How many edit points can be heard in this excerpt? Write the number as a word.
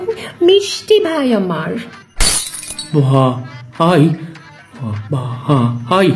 one